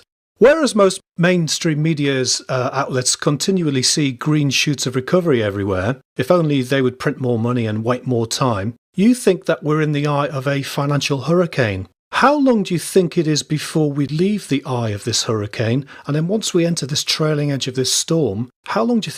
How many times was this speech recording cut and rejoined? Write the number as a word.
one